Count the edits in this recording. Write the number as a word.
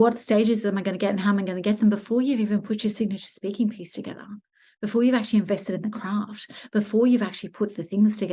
zero